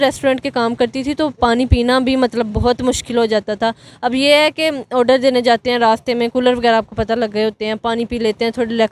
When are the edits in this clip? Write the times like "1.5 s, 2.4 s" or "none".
none